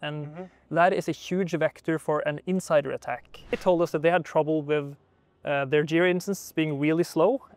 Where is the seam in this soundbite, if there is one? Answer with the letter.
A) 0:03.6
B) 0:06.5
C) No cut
A